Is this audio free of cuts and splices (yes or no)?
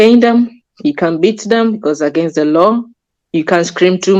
yes